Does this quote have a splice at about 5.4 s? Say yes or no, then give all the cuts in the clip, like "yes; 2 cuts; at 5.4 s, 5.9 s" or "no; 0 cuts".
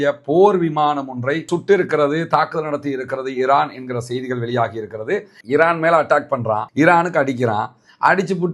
yes; 1 cut; at 5.4 s